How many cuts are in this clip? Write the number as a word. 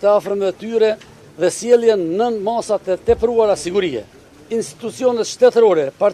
one